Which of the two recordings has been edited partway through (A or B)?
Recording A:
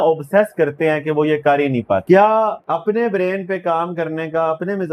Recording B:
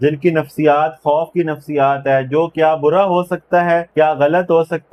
A